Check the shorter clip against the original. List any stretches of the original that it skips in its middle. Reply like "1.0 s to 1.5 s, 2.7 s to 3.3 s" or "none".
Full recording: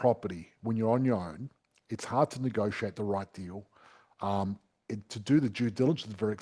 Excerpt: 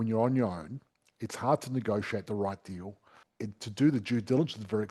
3.9 s to 4.7 s